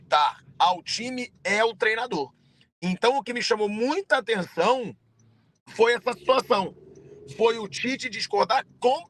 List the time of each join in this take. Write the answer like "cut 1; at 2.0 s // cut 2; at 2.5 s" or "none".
none

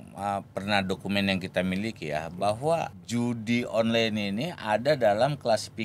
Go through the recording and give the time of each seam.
cut 1; at 3.0 s

